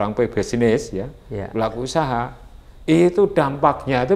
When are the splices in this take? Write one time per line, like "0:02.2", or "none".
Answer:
none